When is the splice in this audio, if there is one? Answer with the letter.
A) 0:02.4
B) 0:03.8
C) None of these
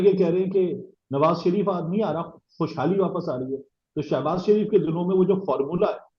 C